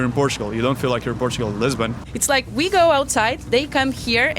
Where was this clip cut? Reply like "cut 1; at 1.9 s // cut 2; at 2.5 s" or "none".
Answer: cut 1; at 2.1 s